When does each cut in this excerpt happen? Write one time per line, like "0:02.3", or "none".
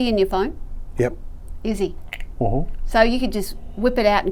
none